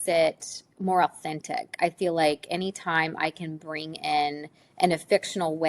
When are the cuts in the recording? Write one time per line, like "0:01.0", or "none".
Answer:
none